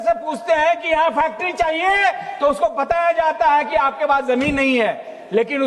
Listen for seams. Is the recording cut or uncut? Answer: uncut